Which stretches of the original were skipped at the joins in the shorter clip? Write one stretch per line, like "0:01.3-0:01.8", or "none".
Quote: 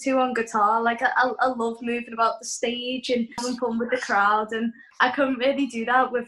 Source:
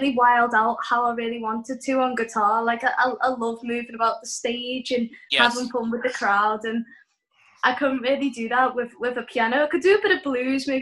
0:05.2-0:05.5
0:07.0-0:07.5